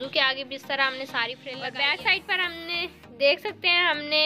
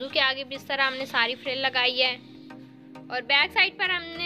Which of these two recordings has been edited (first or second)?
first